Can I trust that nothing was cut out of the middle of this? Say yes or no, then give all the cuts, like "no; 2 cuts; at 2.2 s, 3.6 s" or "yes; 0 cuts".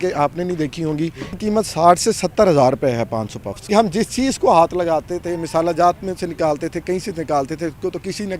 no; 2 cuts; at 1.4 s, 3.6 s